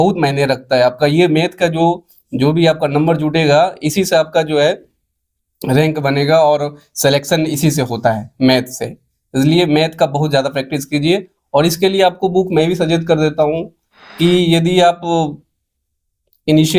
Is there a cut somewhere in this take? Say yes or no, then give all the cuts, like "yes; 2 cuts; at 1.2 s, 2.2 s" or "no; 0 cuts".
no; 0 cuts